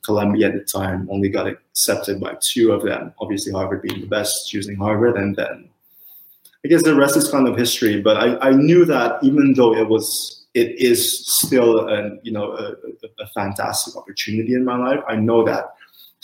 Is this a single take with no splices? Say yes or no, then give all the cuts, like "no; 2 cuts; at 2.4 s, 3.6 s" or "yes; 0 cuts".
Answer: yes; 0 cuts